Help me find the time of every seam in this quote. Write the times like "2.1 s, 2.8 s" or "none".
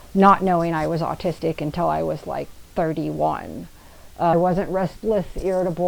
4.3 s